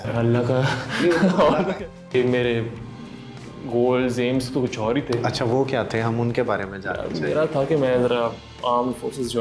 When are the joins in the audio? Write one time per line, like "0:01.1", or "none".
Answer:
0:01.5